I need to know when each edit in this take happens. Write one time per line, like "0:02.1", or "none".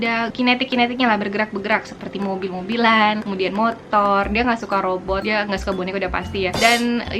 none